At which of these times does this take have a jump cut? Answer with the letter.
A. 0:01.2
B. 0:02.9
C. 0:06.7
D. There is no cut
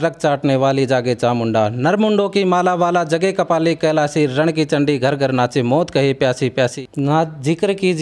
C